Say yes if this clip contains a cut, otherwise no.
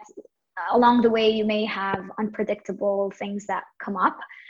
no